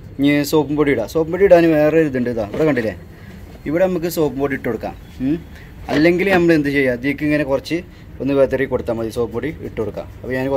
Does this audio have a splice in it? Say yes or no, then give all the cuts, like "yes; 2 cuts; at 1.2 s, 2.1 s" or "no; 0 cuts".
no; 0 cuts